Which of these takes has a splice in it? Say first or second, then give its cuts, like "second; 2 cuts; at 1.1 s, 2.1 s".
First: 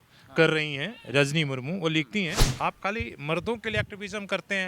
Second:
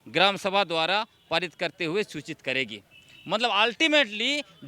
first; 1 cut; at 2.4 s